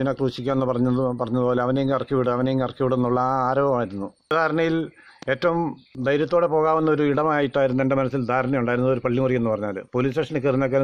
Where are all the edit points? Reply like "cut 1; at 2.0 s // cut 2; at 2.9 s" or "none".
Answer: cut 1; at 4.3 s // cut 2; at 5.9 s